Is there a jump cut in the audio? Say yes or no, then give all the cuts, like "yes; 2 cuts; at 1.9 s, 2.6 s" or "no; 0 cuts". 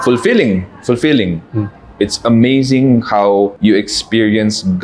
yes; 1 cut; at 3.5 s